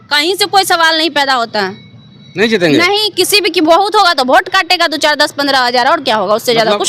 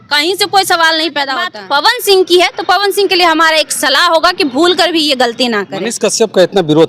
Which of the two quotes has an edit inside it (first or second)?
second